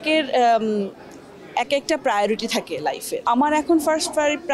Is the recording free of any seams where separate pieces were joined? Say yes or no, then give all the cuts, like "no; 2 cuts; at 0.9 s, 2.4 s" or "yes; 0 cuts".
no; 1 cut; at 3.2 s